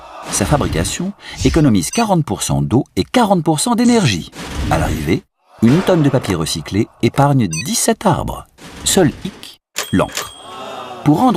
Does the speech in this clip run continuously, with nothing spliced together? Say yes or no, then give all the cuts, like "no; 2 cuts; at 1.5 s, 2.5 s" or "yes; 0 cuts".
no; 1 cut; at 3.5 s